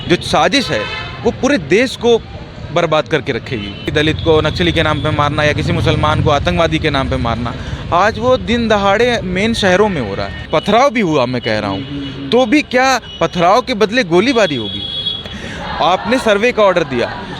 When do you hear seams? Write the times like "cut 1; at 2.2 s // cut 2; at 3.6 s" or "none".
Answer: cut 1; at 3.9 s // cut 2; at 10.3 s // cut 3; at 15.3 s